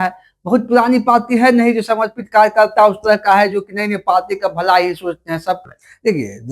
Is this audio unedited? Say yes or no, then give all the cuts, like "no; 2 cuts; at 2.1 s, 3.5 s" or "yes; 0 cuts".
no; 1 cut; at 5.6 s